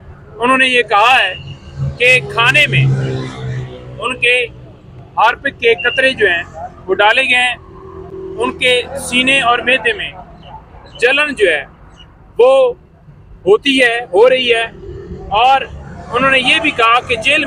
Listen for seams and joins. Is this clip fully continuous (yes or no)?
yes